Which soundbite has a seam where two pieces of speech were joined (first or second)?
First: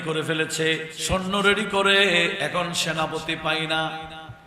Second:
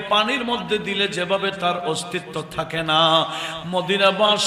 first